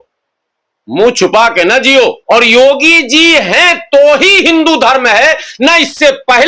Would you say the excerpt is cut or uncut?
cut